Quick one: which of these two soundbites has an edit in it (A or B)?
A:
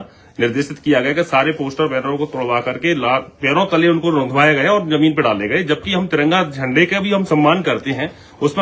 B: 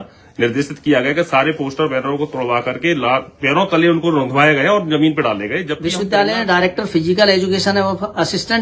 B